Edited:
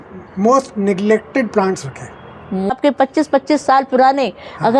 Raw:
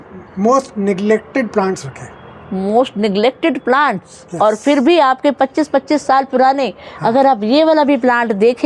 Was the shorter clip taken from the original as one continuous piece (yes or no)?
no